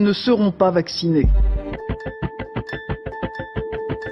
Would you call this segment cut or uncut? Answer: uncut